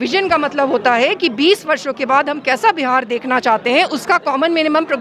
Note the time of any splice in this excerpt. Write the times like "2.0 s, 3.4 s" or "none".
none